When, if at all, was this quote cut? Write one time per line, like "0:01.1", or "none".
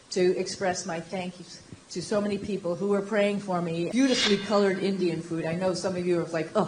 0:03.9